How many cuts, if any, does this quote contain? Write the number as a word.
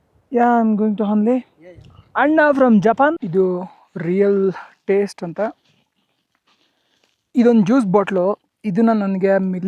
one